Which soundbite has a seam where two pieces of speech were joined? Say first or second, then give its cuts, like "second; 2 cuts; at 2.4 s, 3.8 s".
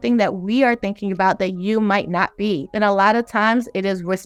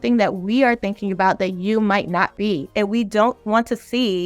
second; 1 cut; at 2.6 s